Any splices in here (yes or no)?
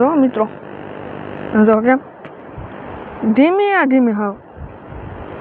no